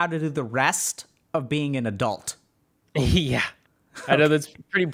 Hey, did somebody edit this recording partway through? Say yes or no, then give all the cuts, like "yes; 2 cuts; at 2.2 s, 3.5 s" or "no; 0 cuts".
no; 0 cuts